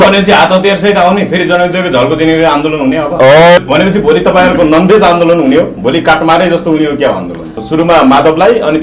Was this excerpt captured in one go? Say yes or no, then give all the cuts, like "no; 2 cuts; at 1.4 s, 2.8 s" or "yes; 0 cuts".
no; 2 cuts; at 3.6 s, 7.6 s